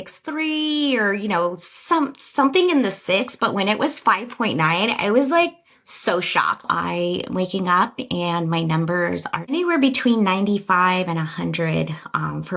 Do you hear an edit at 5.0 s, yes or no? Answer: no